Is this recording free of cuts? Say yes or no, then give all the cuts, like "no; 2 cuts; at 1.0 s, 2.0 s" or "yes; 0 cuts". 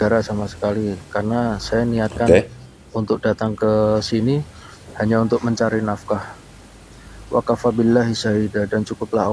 no; 1 cut; at 1.1 s